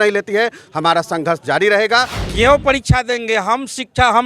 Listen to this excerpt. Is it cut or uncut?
cut